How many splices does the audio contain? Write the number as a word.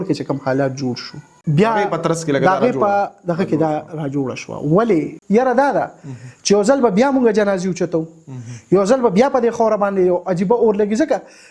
two